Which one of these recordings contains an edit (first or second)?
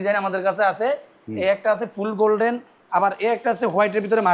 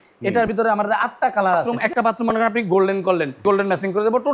second